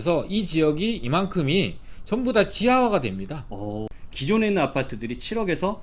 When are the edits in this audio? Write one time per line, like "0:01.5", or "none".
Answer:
0:03.9